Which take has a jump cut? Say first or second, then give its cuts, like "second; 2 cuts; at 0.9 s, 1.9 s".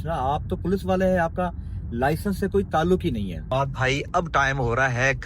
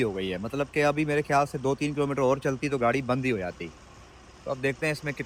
first; 1 cut; at 3.5 s